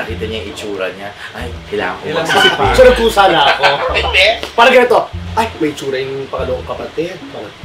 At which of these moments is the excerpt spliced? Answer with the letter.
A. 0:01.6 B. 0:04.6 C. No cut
C